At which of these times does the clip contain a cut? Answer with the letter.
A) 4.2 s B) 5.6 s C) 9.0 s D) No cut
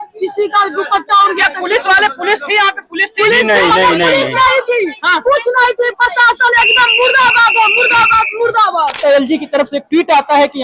C